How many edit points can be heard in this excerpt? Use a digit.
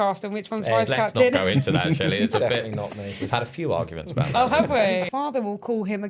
1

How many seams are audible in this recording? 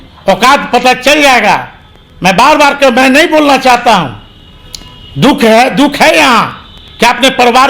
0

